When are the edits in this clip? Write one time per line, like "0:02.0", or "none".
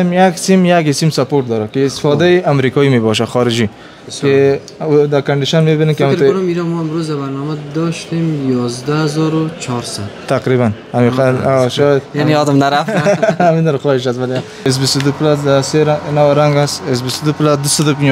0:14.7